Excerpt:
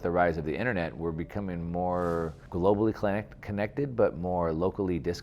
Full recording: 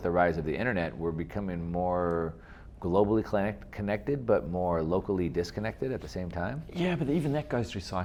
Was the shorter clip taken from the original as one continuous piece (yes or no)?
no